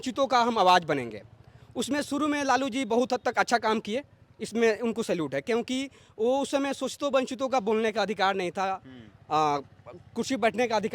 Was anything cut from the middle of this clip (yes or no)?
no